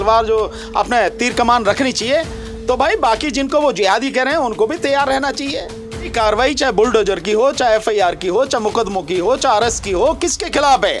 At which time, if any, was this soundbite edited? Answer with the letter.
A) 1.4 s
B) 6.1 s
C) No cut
B